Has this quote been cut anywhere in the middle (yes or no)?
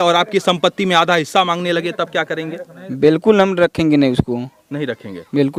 no